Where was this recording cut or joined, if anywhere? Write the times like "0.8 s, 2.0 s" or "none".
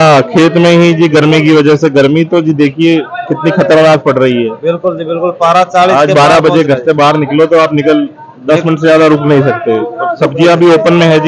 none